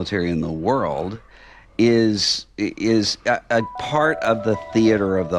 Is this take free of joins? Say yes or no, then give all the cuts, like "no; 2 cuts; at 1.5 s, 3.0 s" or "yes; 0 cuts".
yes; 0 cuts